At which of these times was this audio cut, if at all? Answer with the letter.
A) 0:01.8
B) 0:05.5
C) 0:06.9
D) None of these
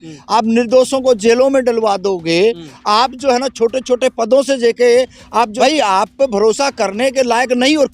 B